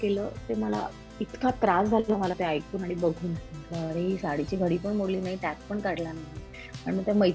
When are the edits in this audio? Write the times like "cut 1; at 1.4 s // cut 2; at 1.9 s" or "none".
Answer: cut 1; at 3.4 s